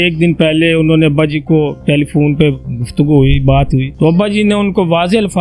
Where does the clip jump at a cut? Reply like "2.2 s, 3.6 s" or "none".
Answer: 3.9 s